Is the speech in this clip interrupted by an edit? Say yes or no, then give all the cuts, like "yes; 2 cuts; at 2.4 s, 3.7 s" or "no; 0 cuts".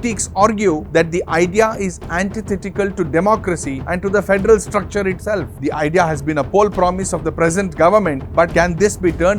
yes; 1 cut; at 5.5 s